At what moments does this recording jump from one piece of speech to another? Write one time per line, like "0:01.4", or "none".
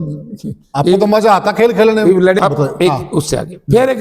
0:02.4